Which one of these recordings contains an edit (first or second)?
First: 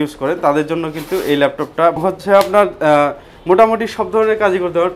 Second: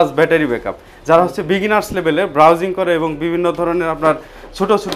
first